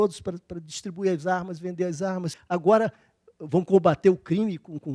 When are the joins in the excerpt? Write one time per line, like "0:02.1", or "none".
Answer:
0:02.3